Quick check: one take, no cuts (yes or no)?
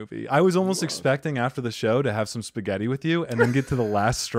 yes